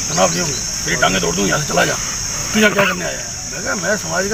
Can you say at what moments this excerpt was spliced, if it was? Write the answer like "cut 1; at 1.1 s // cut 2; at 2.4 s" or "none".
none